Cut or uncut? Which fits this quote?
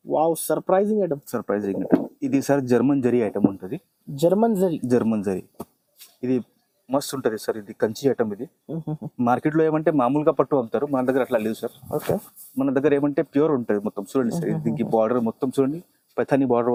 uncut